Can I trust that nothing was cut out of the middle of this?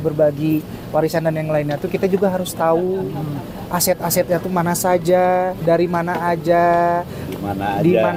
yes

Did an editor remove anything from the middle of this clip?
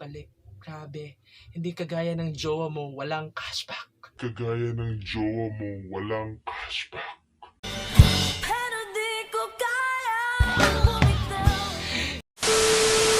yes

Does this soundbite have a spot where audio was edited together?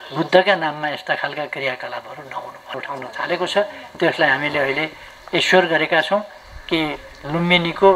yes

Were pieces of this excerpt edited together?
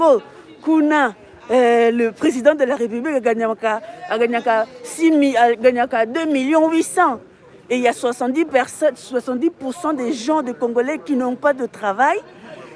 no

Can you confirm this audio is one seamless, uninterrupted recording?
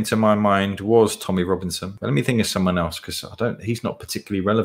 no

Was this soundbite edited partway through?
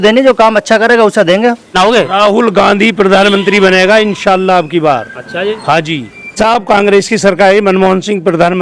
yes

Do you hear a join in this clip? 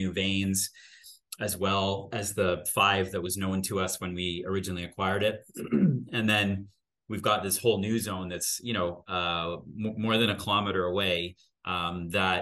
no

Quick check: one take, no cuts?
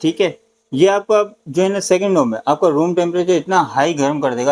yes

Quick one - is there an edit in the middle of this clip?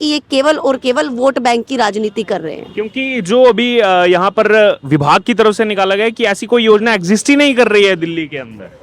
no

